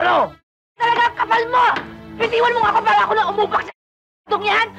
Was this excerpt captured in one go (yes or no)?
yes